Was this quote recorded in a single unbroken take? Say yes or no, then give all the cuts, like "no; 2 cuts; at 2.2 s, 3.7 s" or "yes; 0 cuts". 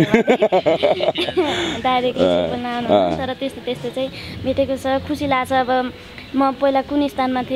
yes; 0 cuts